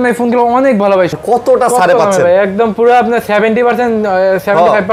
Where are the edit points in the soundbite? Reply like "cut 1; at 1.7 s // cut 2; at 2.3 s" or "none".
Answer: cut 1; at 1.1 s